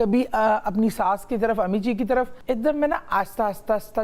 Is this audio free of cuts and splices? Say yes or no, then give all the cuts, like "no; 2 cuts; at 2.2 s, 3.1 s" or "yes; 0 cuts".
no; 1 cut; at 2.4 s